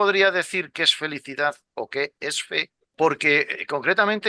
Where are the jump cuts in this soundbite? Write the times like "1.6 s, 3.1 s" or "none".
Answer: 2.8 s